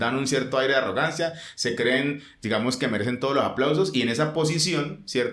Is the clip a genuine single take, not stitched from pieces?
yes; 0 cuts

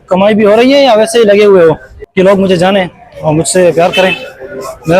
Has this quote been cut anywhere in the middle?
yes; 1 cut; at 1.9 s

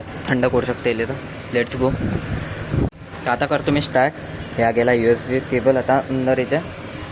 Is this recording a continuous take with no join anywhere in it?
yes; 0 cuts

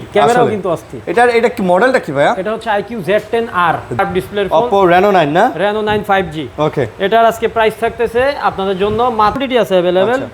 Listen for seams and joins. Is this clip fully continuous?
no; 2 cuts; at 4.0 s, 9.4 s

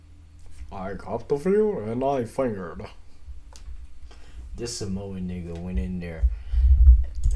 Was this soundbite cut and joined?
no; 0 cuts

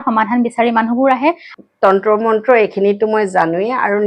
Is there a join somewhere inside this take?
yes; 1 cut; at 1.5 s

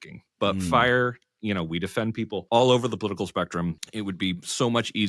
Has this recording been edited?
yes; 2 cuts; at 2.4 s, 3.8 s

